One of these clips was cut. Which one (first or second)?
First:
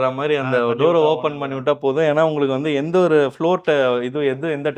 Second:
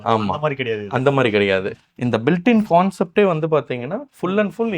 second